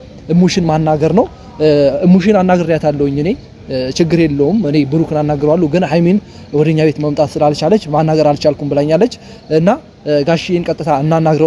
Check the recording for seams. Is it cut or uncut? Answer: uncut